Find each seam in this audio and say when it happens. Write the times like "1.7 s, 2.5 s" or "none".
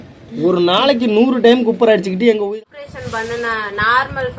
2.5 s